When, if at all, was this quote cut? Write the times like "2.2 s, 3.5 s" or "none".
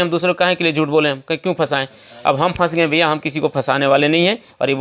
none